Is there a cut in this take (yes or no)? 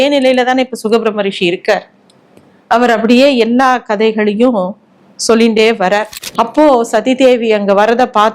yes